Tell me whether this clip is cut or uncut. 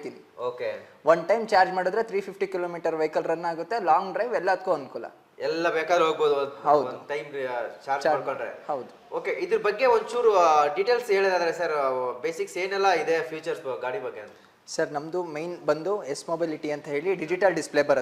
uncut